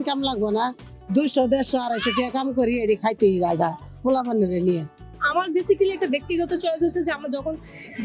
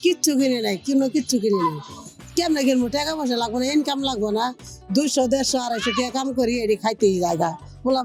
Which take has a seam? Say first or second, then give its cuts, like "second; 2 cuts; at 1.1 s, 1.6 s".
first; 1 cut; at 5.2 s